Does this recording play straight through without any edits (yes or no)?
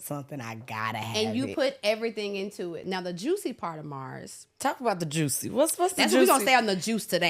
no